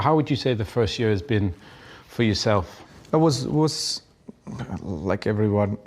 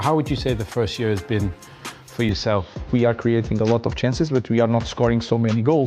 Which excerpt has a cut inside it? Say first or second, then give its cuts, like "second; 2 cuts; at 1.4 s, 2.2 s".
second; 1 cut; at 2.9 s